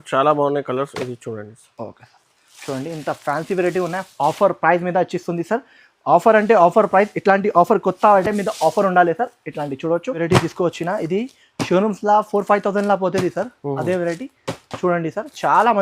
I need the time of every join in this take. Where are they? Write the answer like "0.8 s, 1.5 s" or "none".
10.2 s